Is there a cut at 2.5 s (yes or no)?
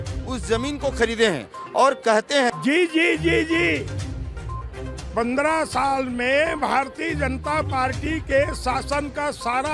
yes